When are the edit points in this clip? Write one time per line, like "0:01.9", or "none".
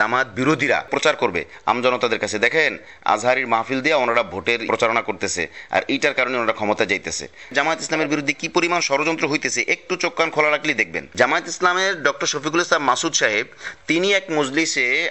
0:00.9
0:04.6
0:07.5